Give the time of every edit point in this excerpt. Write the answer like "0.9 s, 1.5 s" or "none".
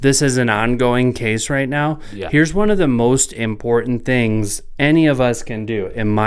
none

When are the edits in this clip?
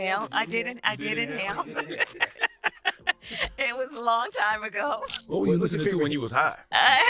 5.1 s

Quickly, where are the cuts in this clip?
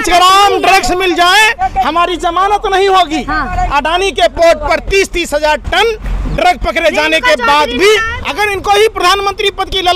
8.1 s

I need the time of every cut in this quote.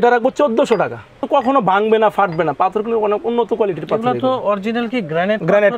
1.2 s

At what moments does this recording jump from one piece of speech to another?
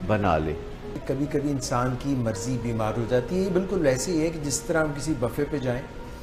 none

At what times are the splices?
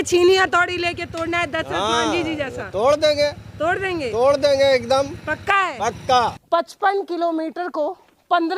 6.4 s

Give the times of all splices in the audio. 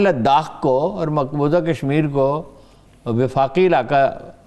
none

